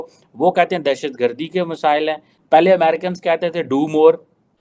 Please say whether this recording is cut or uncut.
cut